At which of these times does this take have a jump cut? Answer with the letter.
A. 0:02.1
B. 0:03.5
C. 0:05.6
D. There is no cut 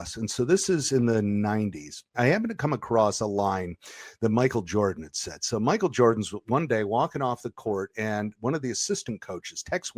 A